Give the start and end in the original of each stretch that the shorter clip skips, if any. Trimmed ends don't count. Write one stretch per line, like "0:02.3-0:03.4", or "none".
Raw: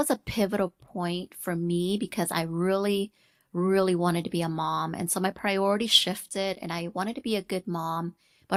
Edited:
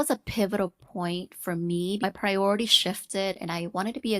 0:02.0-0:05.2